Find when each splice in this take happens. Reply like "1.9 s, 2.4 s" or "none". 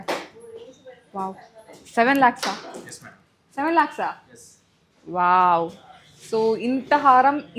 none